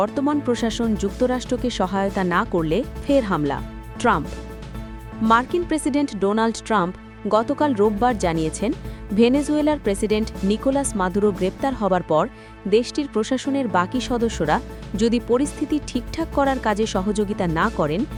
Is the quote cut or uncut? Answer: uncut